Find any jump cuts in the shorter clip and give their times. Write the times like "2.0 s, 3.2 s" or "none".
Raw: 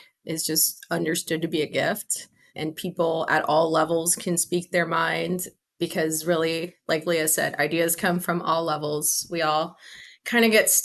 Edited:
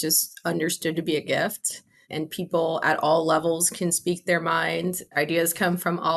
5.1 s